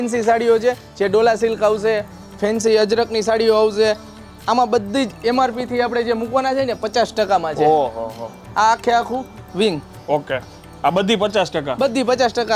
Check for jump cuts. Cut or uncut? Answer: uncut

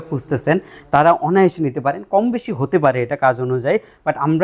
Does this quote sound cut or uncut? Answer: uncut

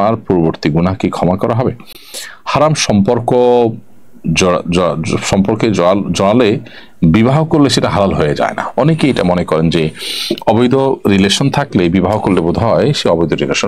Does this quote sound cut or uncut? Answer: uncut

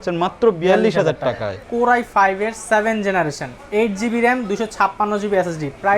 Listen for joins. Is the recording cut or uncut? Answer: cut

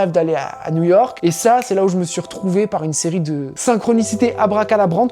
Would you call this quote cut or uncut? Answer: cut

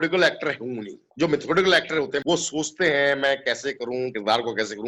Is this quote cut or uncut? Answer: uncut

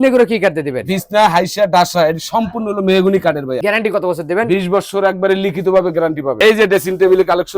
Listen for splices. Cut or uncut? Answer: cut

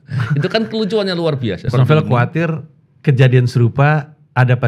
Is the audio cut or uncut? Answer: cut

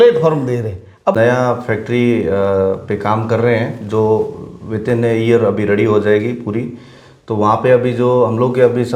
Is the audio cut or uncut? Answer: cut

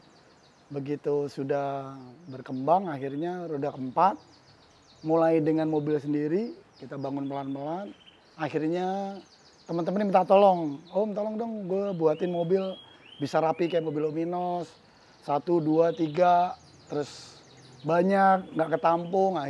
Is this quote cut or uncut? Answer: uncut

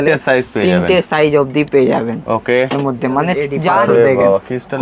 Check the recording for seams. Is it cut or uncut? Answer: cut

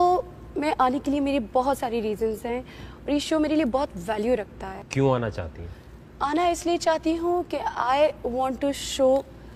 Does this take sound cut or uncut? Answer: cut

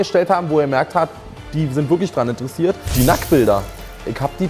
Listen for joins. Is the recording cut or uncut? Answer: cut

